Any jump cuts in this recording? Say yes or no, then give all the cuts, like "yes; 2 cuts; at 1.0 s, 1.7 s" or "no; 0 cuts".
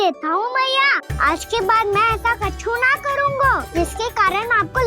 yes; 2 cuts; at 1.1 s, 3.6 s